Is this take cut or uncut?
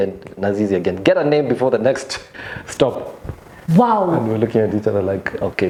uncut